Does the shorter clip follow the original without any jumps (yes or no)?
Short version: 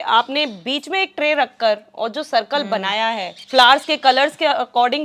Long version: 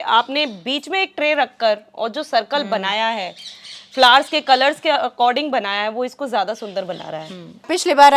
no